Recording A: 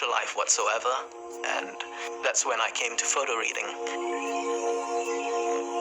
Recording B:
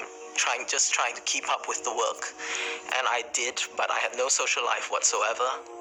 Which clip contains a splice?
A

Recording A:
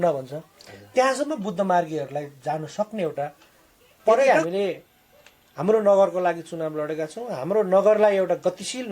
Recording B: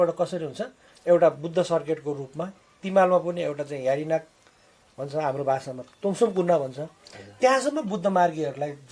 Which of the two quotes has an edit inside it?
A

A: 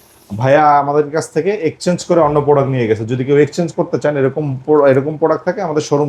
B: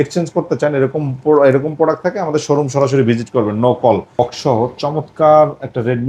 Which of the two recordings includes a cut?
B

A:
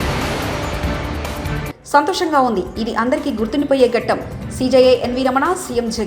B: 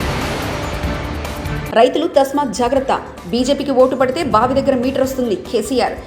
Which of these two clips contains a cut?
A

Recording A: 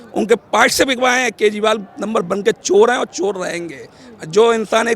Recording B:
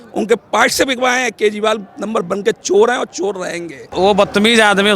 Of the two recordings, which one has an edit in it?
B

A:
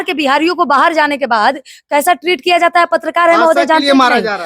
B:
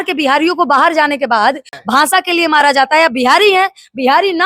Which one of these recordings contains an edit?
B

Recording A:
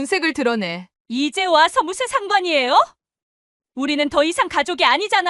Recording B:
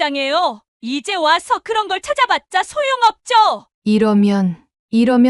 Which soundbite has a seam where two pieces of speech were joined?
B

